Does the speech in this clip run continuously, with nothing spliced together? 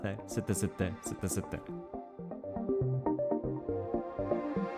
no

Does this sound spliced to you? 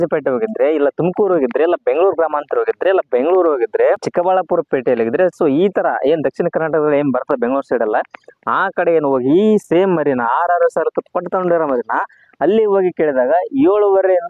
no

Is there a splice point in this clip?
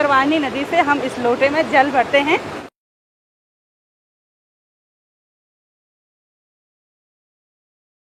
no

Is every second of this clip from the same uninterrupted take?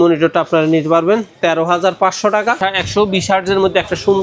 no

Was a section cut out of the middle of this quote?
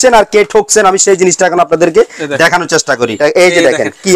yes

